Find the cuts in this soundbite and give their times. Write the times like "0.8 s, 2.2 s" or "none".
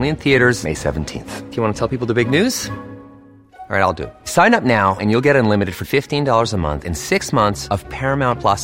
none

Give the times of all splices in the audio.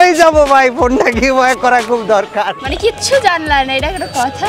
2.6 s

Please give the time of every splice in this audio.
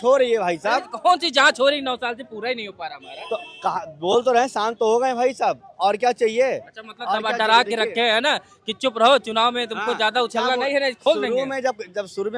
none

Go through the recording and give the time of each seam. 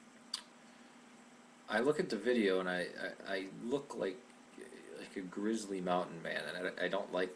none

